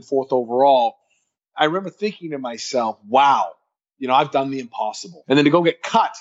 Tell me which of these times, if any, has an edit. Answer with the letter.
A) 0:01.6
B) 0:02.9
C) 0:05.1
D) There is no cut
C